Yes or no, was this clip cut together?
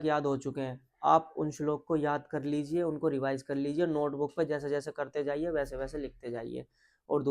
no